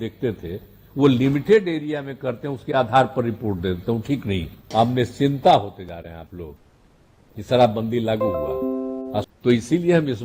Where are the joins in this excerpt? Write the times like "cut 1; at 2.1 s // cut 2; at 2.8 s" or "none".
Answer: cut 1; at 4.6 s // cut 2; at 9.2 s